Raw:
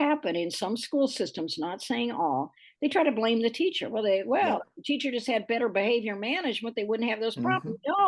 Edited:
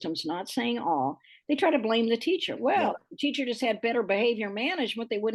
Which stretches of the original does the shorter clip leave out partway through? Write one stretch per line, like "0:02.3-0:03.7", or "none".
0:03.9-0:04.2